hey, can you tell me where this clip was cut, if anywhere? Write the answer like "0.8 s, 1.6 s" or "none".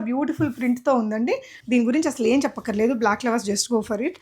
1.5 s